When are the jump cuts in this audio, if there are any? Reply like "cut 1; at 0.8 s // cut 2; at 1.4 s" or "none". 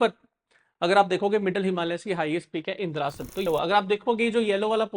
cut 1; at 3.5 s